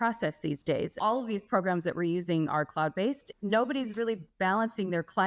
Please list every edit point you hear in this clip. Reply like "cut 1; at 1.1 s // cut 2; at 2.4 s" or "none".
cut 1; at 1.0 s // cut 2; at 3.3 s